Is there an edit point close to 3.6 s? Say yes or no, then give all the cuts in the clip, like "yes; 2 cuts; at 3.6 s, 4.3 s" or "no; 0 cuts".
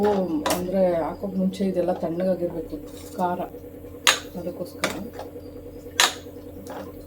no; 0 cuts